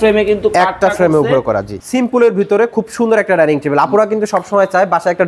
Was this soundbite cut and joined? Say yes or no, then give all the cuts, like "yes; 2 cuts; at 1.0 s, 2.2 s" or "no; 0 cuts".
yes; 1 cut; at 1.7 s